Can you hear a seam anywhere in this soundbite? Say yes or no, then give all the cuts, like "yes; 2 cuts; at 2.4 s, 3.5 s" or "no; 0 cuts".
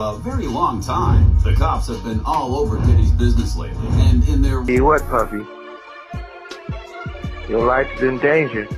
yes; 1 cut; at 4.6 s